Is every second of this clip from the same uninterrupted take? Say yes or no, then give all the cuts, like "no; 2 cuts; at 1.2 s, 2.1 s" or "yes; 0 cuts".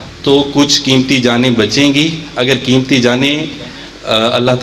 yes; 0 cuts